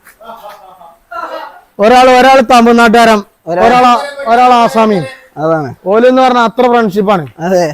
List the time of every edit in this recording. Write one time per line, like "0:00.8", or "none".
none